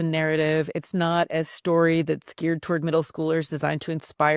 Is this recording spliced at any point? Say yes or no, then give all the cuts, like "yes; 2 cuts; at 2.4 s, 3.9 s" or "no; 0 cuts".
no; 0 cuts